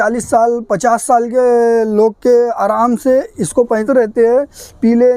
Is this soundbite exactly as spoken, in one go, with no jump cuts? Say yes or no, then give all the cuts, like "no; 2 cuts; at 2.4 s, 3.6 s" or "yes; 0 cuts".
no; 1 cut; at 3.8 s